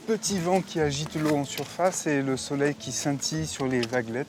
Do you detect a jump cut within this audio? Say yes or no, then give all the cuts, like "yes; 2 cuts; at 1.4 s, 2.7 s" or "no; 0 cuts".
no; 0 cuts